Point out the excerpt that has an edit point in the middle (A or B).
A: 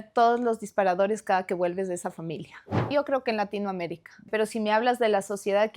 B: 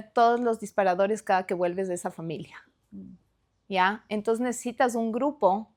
A